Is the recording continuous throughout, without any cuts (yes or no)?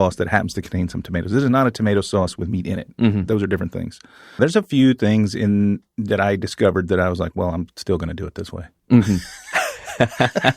no